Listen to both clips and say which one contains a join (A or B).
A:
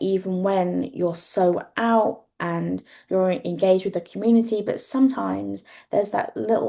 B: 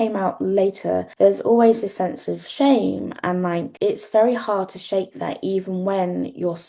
B